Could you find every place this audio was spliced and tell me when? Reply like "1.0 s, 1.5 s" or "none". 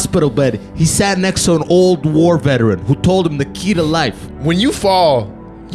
4.3 s